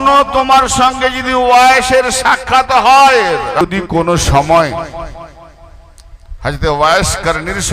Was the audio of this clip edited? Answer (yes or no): yes